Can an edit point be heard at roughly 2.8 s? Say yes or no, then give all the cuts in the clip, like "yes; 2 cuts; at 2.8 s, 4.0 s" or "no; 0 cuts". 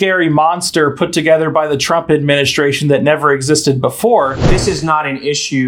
no; 1 cut; at 4.4 s